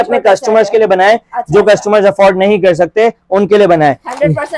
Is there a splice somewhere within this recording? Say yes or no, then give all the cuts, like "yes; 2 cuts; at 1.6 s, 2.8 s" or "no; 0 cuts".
no; 0 cuts